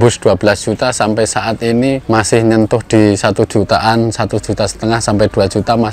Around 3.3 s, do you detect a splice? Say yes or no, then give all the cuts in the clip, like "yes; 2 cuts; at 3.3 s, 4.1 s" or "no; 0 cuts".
no; 1 cut; at 2.0 s